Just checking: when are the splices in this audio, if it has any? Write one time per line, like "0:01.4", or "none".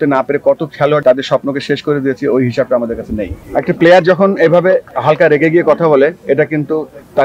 0:01.0
0:03.4
0:04.9